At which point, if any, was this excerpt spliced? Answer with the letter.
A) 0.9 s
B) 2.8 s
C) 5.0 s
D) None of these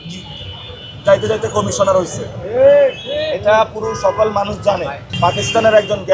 C